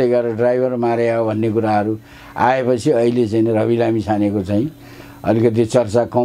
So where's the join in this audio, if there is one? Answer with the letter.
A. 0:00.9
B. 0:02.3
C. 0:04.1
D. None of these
D